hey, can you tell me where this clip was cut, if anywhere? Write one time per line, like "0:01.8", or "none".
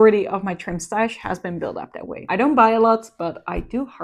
none